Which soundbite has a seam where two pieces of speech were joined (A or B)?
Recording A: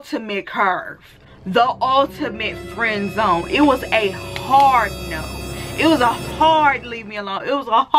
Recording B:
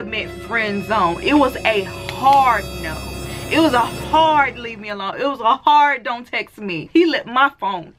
B